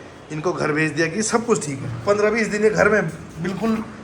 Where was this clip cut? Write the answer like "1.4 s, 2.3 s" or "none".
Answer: 1.9 s